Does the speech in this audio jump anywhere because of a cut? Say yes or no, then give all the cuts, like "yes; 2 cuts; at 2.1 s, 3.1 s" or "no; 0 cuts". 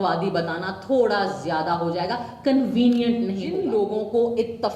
yes; 1 cut; at 3.6 s